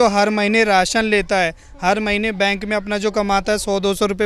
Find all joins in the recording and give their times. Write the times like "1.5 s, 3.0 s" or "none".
none